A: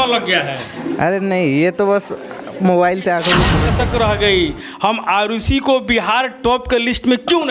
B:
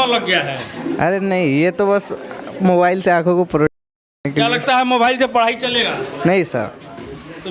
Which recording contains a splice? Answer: A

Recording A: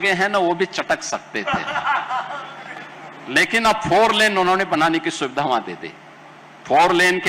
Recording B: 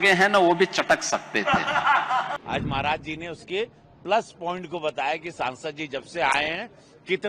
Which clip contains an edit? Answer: B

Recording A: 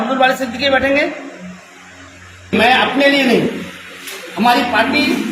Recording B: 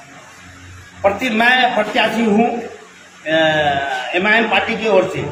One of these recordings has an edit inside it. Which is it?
A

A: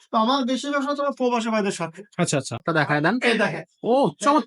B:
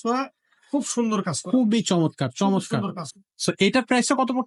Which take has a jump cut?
A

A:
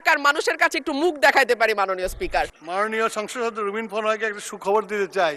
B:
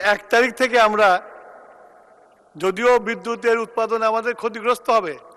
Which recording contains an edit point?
A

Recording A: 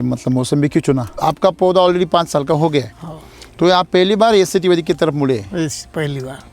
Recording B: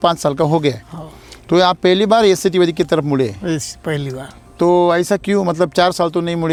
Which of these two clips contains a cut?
A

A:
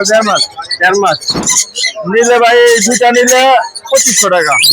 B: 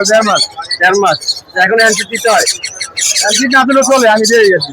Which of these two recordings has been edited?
A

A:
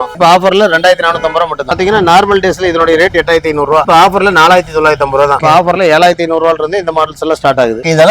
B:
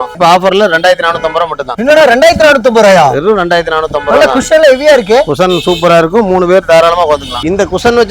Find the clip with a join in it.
A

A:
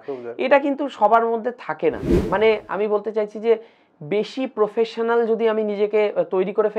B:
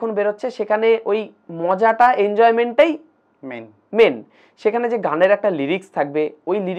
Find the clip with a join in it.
A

